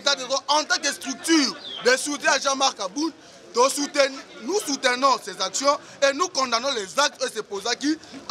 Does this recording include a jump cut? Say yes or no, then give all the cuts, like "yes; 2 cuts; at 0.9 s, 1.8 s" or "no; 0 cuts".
no; 0 cuts